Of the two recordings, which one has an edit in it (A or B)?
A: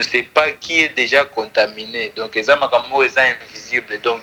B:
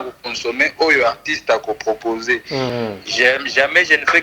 B